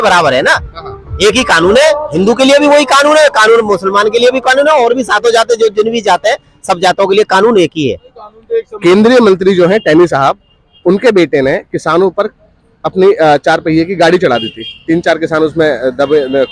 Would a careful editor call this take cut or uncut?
uncut